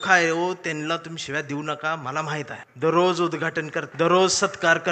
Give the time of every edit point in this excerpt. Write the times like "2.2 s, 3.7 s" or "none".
2.6 s, 3.8 s